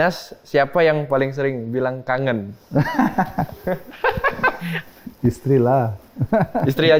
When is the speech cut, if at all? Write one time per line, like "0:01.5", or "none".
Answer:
none